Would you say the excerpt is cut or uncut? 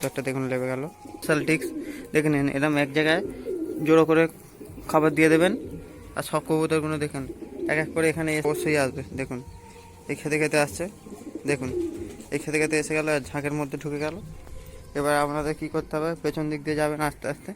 cut